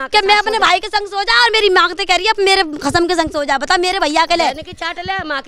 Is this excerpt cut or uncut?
uncut